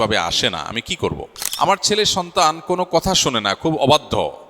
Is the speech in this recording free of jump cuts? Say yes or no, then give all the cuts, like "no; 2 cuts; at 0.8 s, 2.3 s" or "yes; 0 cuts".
no; 1 cut; at 1.4 s